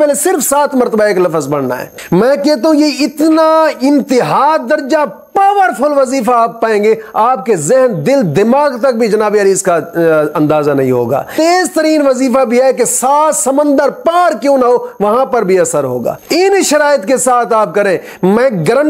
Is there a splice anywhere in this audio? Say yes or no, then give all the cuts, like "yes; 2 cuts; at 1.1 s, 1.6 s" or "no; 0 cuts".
yes; 3 cuts; at 1.9 s, 11.3 s, 16.2 s